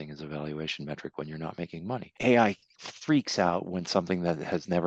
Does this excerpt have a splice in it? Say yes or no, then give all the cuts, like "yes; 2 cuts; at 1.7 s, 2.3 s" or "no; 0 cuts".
yes; 1 cut; at 2.1 s